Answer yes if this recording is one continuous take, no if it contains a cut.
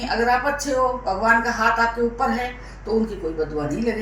yes